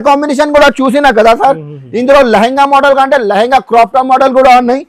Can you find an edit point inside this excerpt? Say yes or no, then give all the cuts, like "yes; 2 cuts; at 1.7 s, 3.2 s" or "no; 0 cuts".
no; 0 cuts